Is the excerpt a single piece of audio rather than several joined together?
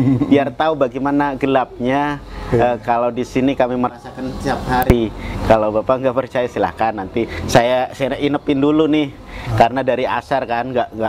yes; 0 cuts

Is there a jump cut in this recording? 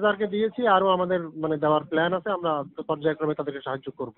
no; 0 cuts

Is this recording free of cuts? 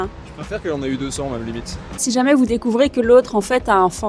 no; 1 cut; at 1.9 s

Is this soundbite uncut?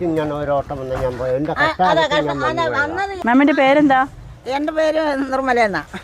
no; 1 cut; at 3.1 s

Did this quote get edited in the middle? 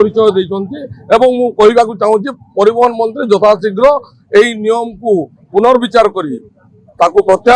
no; 0 cuts

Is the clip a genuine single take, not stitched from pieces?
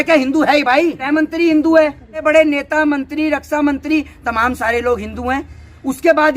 no; 2 cuts; at 1.0 s, 2.2 s

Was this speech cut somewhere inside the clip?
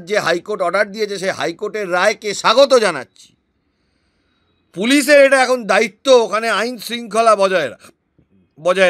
no; 0 cuts

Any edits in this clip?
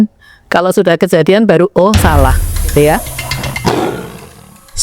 yes; 1 cut; at 3.3 s

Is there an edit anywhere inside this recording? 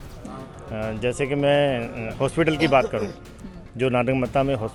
no; 0 cuts

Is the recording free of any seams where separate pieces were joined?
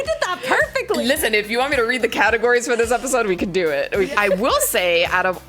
no; 2 cuts; at 1.0 s, 4.0 s

